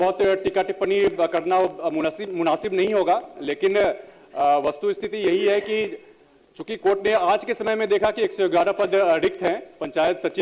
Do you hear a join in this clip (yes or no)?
no